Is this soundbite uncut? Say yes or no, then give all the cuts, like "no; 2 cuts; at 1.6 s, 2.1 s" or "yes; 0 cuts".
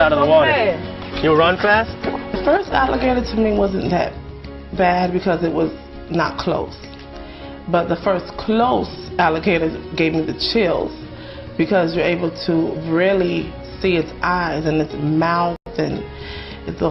no; 1 cut; at 2.4 s